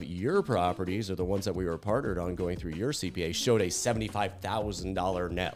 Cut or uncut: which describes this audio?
uncut